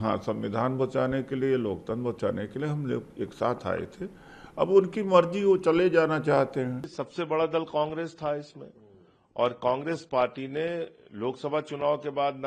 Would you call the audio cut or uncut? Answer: cut